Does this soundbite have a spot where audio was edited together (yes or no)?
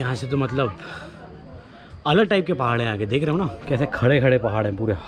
no